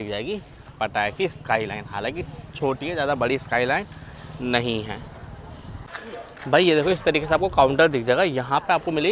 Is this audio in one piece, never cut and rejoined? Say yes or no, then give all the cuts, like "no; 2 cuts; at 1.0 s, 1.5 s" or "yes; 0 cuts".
yes; 0 cuts